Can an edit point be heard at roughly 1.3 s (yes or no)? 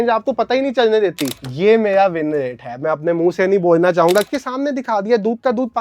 yes